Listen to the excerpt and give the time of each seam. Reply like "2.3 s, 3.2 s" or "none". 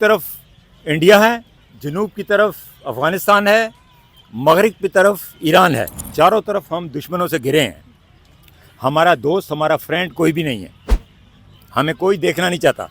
1.5 s, 6.0 s